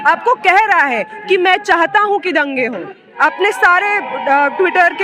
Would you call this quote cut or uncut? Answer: uncut